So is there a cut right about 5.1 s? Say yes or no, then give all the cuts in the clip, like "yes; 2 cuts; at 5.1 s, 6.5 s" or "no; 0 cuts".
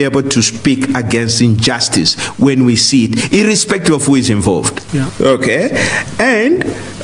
yes; 1 cut; at 5.1 s